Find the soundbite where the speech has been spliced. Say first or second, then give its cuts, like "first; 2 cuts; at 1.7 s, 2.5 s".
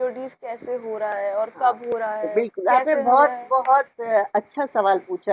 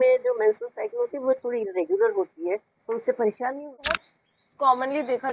second; 1 cut; at 4.0 s